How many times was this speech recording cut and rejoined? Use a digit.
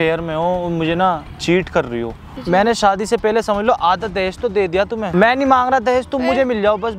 2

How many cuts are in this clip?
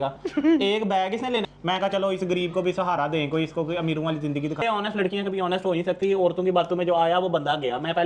2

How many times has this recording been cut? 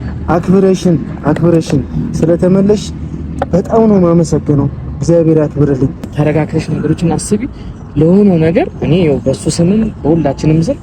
1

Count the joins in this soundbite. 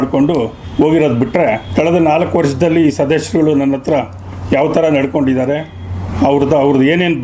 1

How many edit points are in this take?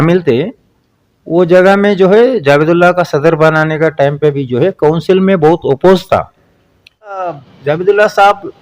1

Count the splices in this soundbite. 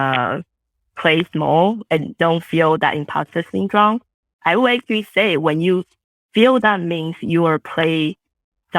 0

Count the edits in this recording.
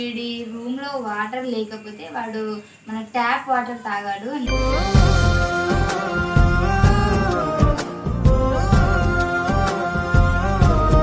0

